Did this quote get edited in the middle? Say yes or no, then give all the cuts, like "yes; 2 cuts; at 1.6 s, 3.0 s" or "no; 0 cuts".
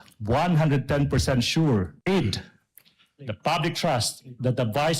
yes; 1 cut; at 1.9 s